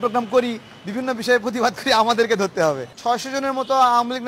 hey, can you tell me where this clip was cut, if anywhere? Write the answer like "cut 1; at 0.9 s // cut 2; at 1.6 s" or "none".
cut 1; at 2.9 s